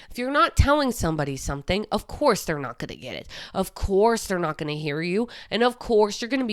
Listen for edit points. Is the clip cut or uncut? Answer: uncut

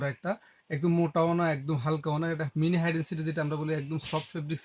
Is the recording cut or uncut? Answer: uncut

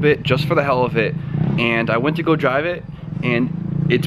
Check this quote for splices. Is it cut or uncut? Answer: cut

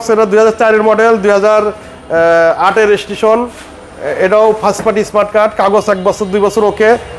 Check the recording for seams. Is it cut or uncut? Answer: uncut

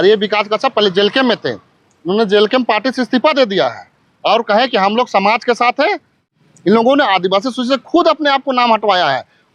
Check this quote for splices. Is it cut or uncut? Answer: cut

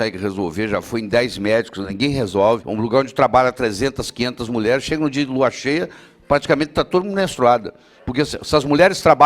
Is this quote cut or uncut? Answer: cut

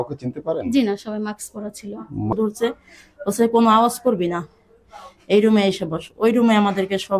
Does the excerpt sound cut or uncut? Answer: cut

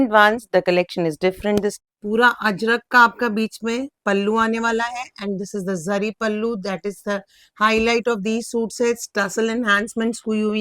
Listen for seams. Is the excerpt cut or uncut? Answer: cut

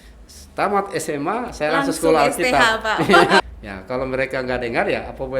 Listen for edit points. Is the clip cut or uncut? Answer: cut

